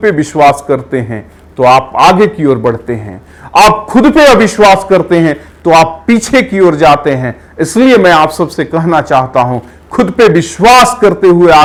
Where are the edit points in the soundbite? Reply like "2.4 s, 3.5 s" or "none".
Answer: none